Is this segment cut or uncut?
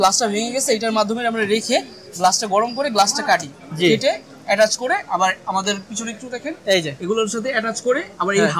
uncut